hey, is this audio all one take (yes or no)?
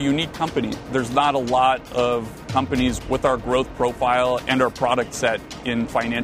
no